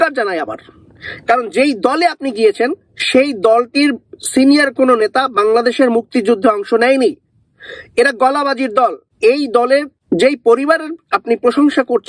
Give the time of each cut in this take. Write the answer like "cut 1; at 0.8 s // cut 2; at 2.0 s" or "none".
cut 1; at 9.1 s // cut 2; at 9.9 s